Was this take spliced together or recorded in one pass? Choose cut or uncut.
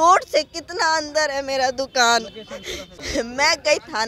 cut